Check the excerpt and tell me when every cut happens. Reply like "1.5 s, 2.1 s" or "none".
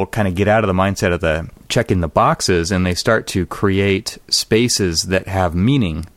1.6 s